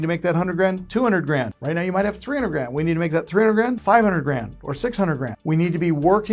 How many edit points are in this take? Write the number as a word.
three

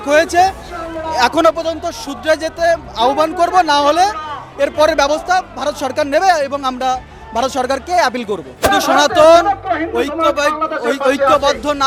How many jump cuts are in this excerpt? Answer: one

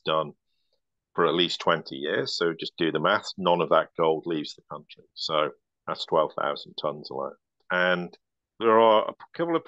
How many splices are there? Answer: one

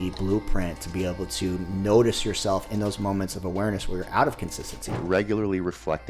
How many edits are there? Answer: one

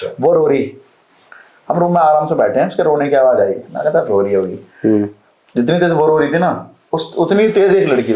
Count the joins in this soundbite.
zero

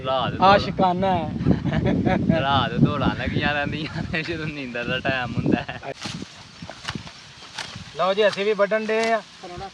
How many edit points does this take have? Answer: one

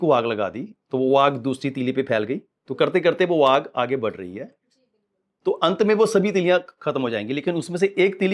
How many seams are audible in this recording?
zero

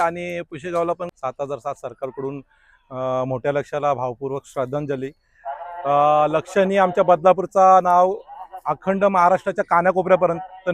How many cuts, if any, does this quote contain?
one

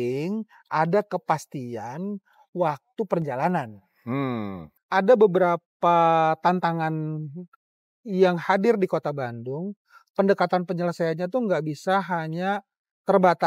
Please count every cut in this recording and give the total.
one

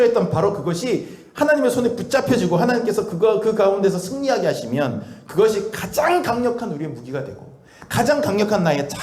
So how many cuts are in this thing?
zero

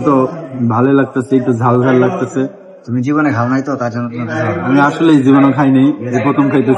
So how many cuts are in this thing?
zero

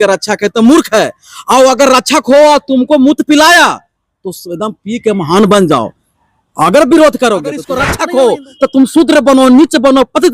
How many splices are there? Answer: one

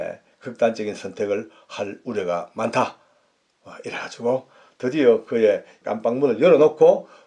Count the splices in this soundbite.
one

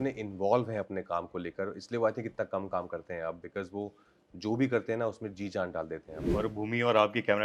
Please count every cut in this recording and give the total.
one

